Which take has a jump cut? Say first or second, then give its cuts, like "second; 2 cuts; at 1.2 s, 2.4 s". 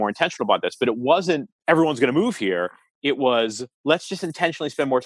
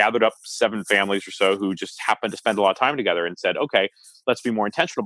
first; 2 cuts; at 1.5 s, 3.7 s